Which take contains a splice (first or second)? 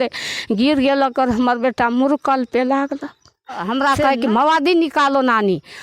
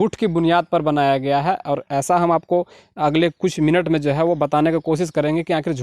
first